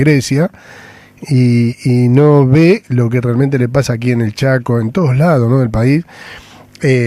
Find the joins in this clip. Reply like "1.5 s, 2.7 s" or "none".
2.1 s